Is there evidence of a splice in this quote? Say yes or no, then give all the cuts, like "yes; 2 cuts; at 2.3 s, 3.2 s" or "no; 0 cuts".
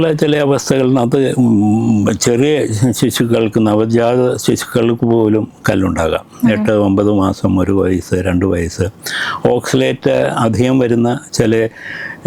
no; 0 cuts